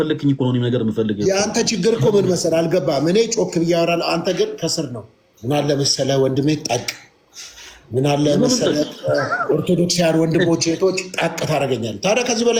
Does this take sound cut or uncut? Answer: uncut